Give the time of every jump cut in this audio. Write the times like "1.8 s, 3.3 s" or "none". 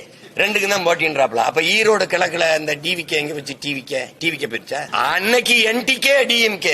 4.9 s